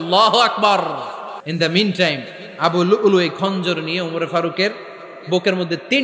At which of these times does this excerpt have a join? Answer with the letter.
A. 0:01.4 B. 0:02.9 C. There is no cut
A